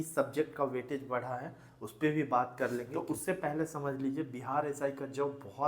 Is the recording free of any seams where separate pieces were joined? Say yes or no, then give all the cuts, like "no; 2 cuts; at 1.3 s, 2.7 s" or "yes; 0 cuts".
no; 1 cut; at 2.9 s